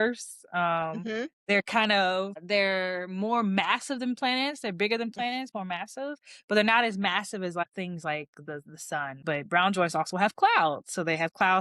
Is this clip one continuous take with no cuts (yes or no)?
no